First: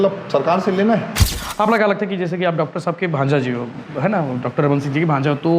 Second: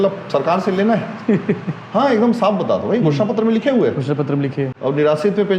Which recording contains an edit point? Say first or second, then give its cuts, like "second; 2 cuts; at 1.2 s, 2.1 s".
first; 1 cut; at 1.1 s